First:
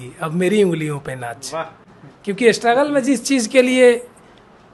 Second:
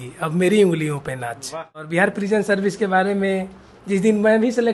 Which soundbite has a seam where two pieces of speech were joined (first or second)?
second